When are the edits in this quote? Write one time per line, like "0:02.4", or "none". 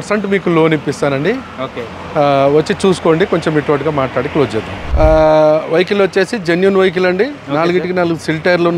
0:04.8